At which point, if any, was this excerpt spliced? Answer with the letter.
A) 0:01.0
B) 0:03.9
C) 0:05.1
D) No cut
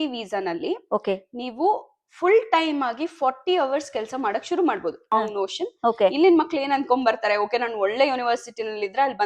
C